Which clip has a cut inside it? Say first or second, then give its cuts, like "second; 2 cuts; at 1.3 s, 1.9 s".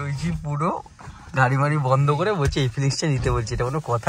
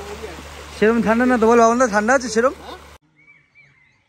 second; 1 cut; at 2.9 s